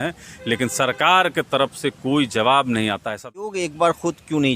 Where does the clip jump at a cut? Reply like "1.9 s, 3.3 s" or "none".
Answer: 3.6 s